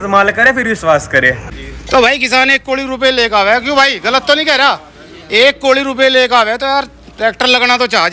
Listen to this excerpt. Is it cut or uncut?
cut